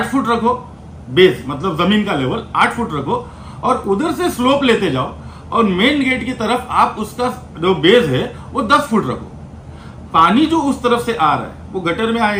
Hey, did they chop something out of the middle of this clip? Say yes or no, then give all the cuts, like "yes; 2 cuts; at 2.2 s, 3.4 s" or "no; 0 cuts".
no; 0 cuts